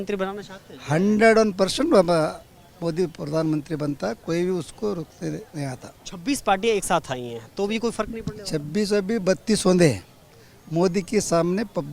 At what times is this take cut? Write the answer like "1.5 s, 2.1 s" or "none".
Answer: none